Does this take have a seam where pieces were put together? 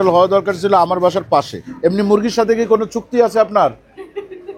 yes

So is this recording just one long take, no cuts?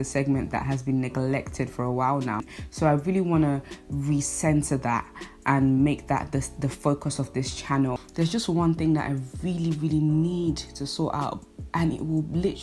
no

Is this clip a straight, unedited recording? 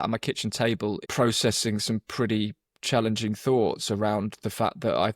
no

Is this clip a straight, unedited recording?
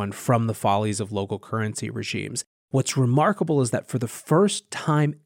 no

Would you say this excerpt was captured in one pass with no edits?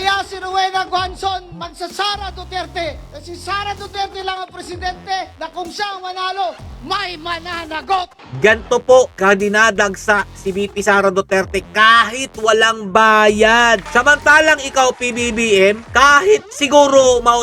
no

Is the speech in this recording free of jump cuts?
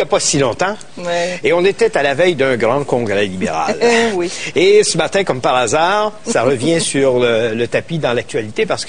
no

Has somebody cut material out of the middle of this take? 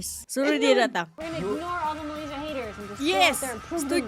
yes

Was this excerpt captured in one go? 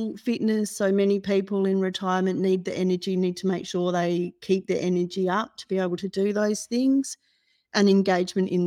yes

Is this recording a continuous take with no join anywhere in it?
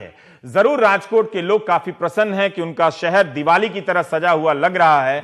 no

